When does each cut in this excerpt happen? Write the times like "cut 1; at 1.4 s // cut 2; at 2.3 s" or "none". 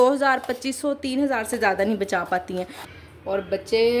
cut 1; at 2.8 s